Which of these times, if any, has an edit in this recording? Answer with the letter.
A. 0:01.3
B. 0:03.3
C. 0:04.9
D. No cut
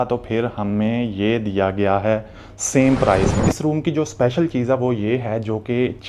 B